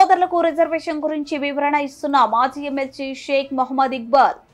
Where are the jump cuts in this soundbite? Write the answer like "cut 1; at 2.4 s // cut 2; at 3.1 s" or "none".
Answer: none